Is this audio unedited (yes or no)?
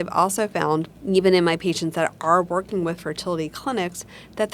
no